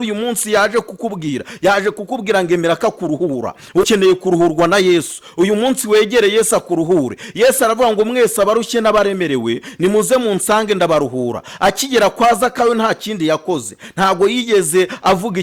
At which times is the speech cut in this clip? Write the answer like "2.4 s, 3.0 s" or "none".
3.8 s